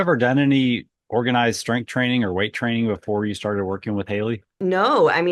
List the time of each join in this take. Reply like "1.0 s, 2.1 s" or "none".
0.9 s, 4.6 s